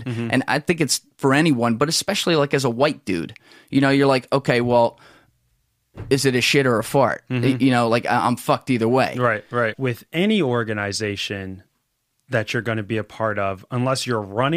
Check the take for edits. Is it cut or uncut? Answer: cut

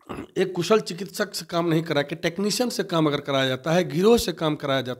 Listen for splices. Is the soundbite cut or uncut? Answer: uncut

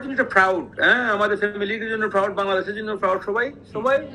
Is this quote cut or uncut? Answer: uncut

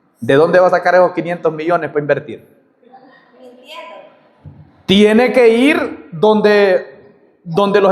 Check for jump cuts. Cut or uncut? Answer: uncut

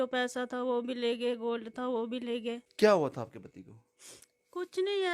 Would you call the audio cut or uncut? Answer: uncut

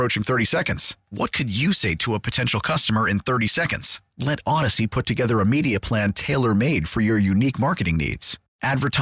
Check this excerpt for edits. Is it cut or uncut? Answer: uncut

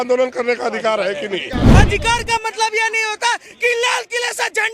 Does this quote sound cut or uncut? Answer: cut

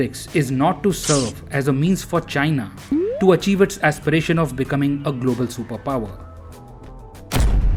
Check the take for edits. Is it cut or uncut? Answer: uncut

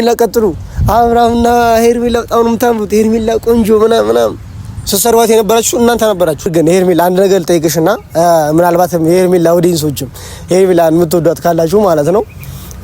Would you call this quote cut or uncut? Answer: cut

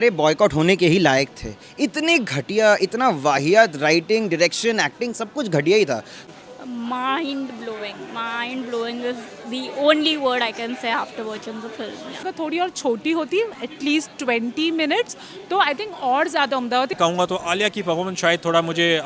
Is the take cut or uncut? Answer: cut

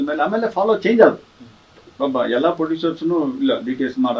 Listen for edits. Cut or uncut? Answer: uncut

